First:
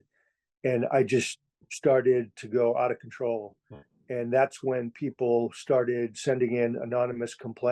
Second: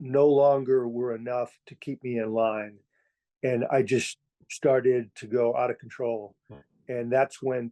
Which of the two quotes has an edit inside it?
first; 1 cut; at 6.2 s

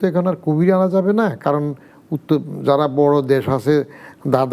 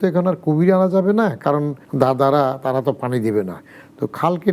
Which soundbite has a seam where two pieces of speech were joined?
second; 1 cut; at 1.8 s

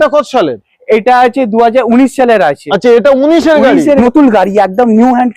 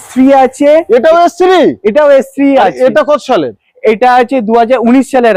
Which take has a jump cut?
first; 1 cut; at 4.0 s

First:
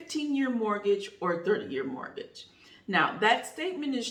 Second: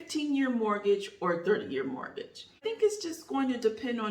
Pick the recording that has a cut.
second; 1 cut; at 2.6 s

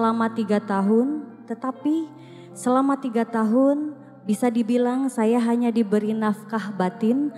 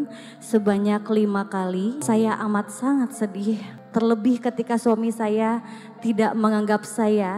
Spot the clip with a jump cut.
second; 1 cut; at 2.0 s

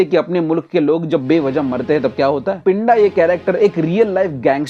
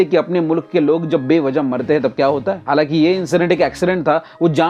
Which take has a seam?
first; 1 cut; at 2.6 s

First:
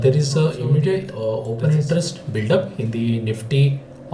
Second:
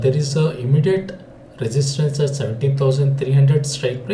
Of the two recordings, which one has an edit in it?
first; 1 cut; at 1.1 s

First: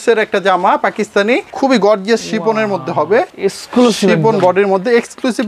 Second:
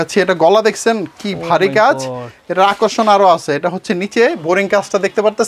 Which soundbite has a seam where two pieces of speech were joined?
first; 2 cuts; at 1.5 s, 3.3 s

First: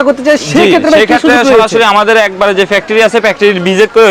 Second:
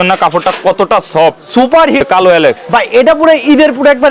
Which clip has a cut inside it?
second; 1 cut; at 1.7 s

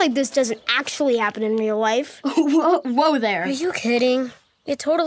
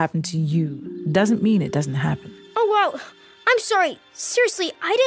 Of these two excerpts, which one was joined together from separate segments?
first; 1 cut; at 2.3 s

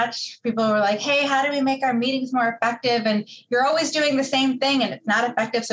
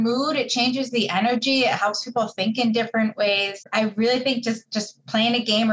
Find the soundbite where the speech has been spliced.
second; 1 cut; at 3.7 s

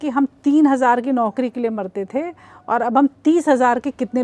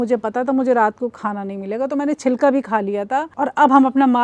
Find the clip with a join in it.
second; 1 cut; at 3.3 s

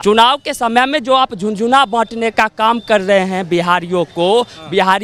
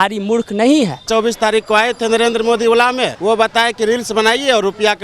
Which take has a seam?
second; 2 cuts; at 1.1 s, 3.1 s

